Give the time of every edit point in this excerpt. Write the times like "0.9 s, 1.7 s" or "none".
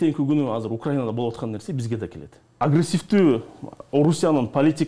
2.5 s